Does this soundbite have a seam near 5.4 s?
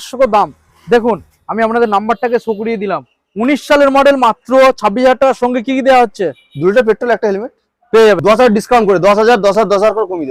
no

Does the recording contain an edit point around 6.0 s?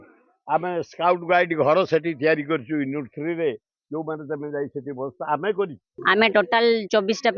yes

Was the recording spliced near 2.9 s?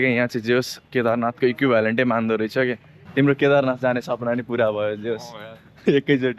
yes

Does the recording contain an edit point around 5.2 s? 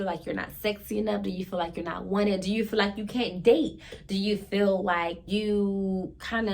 yes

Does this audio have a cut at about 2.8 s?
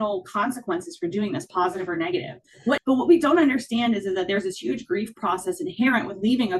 yes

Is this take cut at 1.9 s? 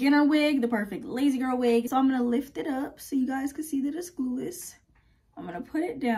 yes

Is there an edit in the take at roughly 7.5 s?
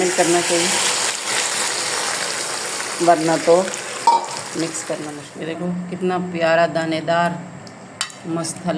no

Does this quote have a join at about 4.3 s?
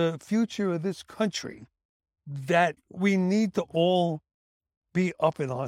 no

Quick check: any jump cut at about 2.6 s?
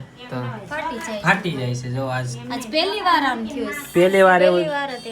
no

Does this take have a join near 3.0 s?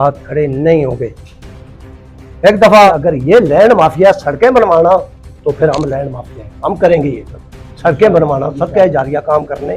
yes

